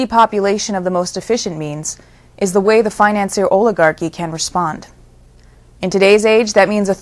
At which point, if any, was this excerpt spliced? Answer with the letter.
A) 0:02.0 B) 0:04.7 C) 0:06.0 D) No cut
D